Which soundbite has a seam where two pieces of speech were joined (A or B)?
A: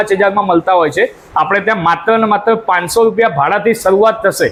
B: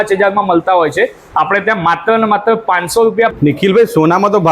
B